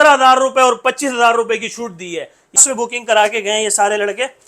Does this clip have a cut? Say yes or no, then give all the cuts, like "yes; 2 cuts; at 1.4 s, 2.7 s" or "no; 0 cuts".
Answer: yes; 1 cut; at 2.6 s